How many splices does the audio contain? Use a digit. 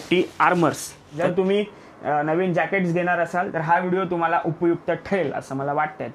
1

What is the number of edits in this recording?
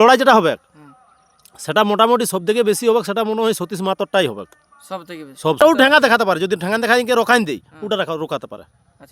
1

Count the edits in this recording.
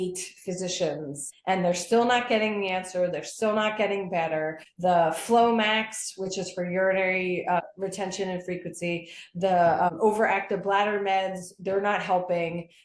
4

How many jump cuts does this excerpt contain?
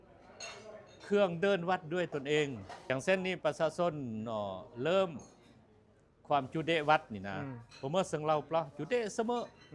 1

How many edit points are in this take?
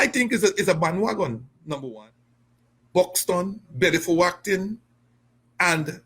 1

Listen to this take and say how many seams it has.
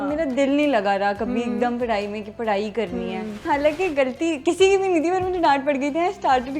1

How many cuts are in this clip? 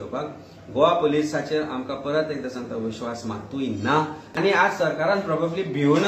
1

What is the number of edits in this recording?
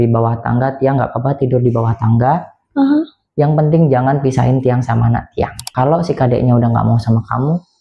1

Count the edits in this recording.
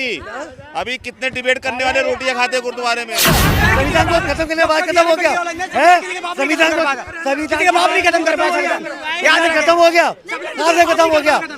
1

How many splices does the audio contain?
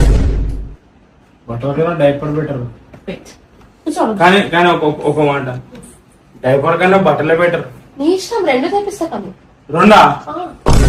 0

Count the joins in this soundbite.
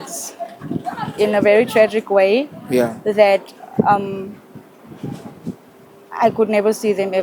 0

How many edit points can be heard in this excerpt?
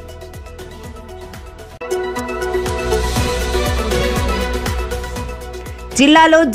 2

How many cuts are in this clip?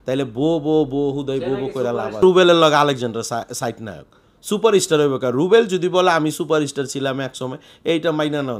1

